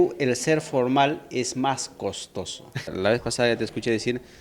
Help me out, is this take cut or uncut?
cut